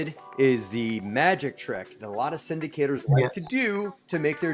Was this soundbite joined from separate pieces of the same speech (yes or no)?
no